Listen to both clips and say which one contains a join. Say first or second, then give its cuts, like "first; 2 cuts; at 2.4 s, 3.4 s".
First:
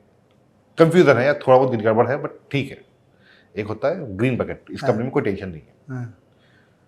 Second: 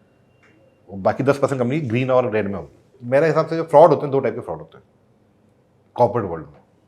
second; 1 cut; at 2.9 s